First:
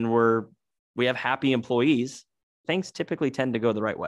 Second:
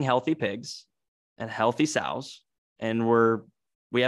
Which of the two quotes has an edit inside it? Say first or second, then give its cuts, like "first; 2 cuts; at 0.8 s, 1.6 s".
first; 1 cut; at 2.6 s